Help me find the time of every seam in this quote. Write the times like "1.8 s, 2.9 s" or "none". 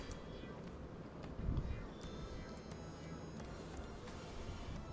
none